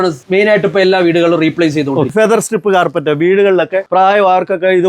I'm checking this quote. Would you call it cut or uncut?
cut